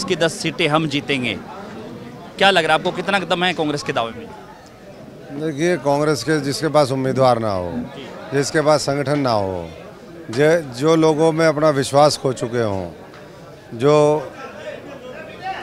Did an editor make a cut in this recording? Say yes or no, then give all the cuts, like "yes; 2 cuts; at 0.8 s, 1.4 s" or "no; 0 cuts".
no; 0 cuts